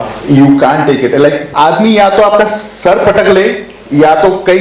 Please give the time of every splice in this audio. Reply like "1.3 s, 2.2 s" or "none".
1.5 s

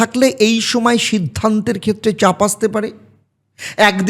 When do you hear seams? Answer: none

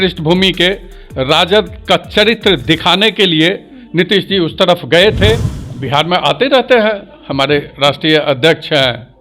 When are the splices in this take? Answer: 5.6 s

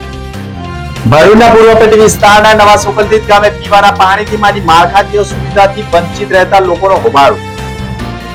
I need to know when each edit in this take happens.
none

